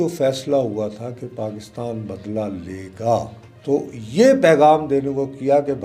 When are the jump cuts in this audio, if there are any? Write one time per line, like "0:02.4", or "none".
0:03.4